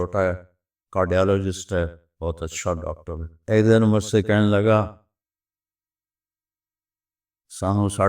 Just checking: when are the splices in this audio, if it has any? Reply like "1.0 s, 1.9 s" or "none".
3.4 s